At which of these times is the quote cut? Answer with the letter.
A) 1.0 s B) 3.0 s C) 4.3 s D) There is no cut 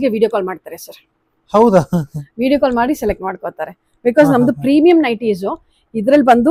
D